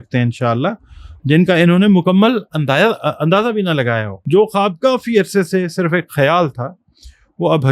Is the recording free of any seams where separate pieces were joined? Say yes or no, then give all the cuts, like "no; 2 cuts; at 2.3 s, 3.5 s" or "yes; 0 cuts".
no; 1 cut; at 4.1 s